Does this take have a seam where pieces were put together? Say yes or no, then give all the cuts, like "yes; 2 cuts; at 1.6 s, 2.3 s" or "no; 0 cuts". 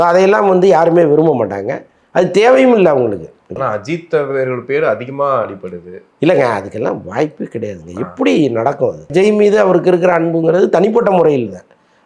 yes; 2 cuts; at 3.5 s, 9.1 s